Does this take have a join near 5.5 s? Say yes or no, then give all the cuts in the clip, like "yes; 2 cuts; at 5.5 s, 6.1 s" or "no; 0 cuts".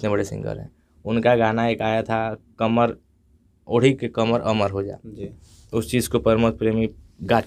no; 0 cuts